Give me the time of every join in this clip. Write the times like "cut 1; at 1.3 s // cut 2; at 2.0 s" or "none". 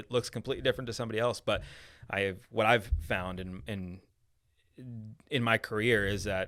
none